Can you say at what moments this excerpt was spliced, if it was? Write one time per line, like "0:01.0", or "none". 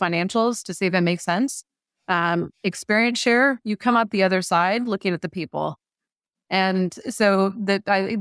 none